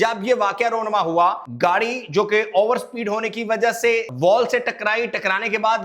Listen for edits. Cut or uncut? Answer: cut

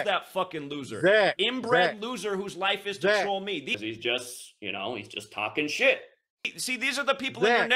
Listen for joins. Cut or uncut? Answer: uncut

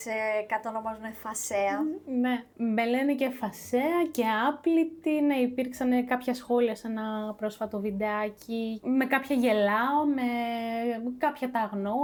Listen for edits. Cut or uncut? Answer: uncut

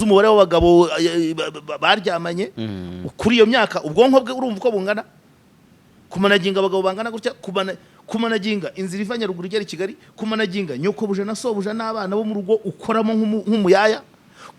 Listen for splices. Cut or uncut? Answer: uncut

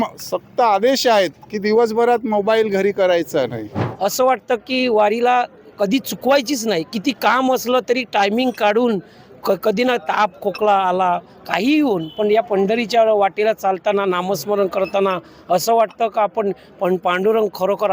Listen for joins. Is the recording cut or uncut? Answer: cut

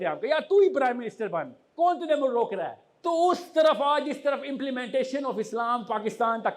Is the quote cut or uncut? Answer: cut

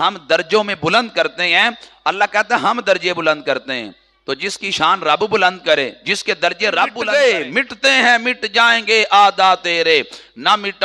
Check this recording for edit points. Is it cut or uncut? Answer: cut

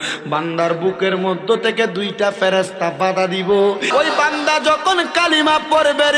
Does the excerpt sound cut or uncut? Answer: cut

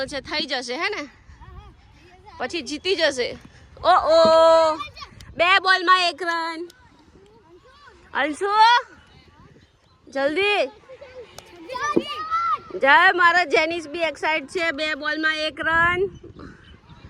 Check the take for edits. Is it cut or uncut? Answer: uncut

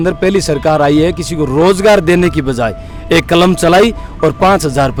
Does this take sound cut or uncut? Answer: uncut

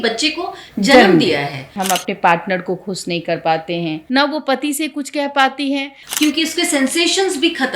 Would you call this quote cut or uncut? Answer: cut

